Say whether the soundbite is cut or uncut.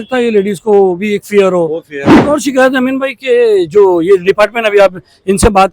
cut